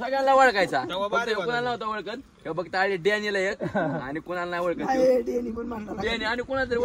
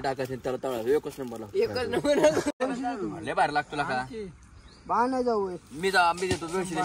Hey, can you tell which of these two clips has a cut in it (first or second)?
second